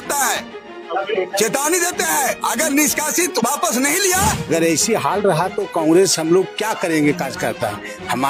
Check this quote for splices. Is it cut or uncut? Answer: uncut